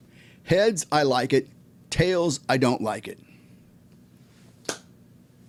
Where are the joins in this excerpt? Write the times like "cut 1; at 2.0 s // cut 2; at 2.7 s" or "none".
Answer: none